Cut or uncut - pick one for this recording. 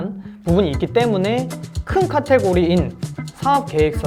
uncut